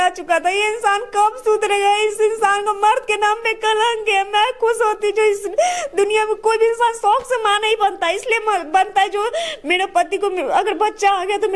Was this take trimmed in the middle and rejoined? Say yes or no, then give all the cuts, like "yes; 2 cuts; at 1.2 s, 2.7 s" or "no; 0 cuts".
no; 0 cuts